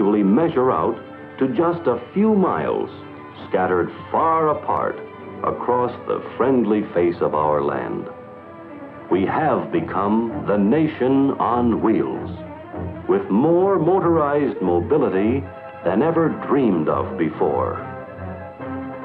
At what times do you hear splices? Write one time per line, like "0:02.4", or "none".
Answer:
0:17.1